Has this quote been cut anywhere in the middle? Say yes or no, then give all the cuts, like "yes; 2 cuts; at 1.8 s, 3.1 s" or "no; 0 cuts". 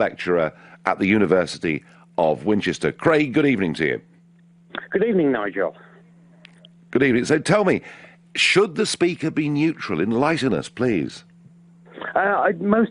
no; 0 cuts